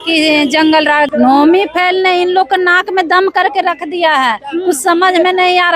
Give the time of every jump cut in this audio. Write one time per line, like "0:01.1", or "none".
0:01.1